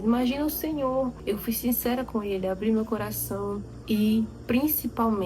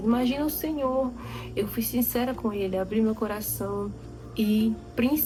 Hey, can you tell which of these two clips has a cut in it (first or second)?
first